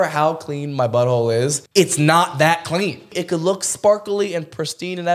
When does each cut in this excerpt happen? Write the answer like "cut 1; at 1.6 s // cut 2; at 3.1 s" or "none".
cut 1; at 1.6 s // cut 2; at 3.1 s